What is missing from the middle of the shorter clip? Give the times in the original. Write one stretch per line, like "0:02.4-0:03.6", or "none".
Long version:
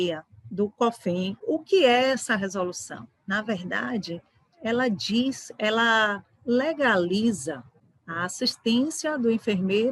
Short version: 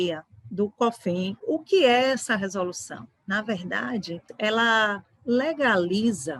0:04.3-0:05.5